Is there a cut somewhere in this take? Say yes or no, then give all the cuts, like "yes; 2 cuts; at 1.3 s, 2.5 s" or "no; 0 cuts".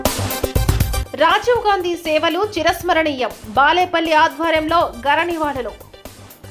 no; 0 cuts